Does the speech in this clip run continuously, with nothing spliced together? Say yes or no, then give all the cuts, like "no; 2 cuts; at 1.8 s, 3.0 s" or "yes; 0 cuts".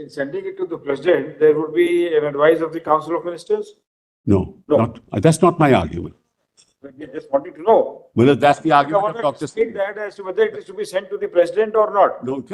yes; 0 cuts